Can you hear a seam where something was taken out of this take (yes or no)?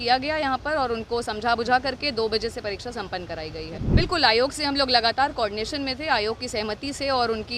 yes